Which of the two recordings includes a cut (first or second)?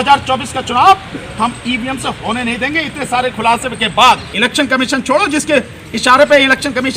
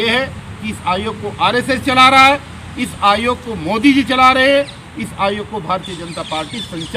first